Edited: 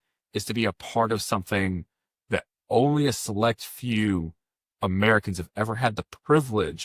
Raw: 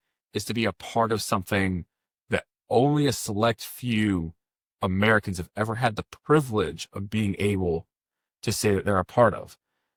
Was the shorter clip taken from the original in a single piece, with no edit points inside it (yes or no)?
yes